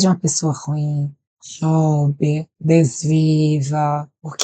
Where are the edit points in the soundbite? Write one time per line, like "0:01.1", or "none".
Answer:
0:02.5